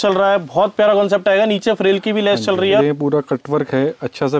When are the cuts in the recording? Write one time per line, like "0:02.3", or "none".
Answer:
0:02.8

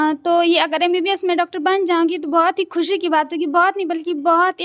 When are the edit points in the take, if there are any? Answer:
none

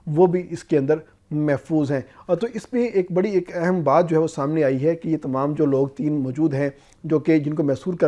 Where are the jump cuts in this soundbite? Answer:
none

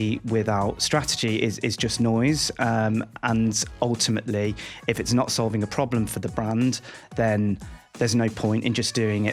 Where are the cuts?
none

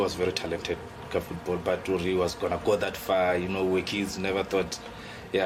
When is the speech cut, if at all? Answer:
none

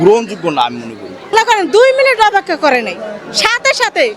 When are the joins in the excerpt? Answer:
0:01.3

